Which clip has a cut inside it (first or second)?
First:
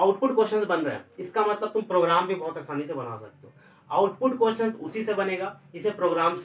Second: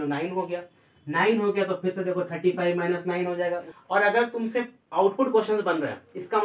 second